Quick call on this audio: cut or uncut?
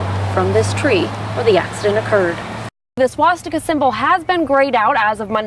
cut